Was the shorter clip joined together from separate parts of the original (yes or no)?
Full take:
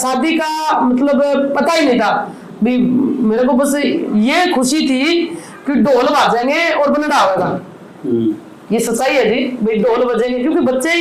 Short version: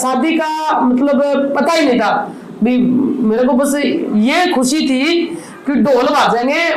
no